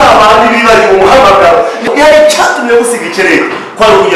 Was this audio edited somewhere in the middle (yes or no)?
yes